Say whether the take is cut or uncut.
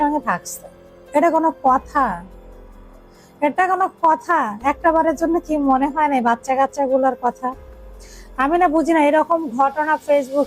uncut